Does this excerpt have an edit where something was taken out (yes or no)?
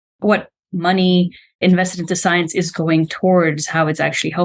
yes